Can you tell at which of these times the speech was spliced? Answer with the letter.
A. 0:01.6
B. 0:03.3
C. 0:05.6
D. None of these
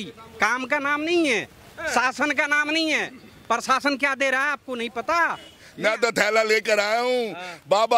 C